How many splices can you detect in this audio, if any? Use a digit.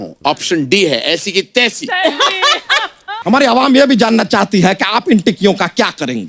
1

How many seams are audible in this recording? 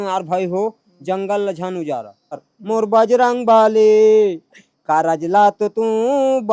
1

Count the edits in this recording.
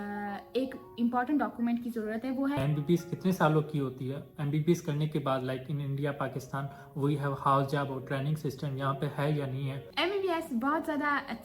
2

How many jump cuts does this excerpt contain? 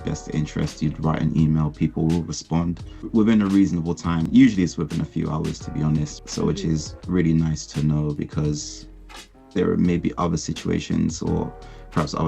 3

